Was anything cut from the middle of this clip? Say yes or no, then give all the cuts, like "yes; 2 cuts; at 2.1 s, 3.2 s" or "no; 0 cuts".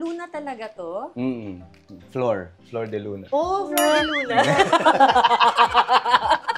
no; 0 cuts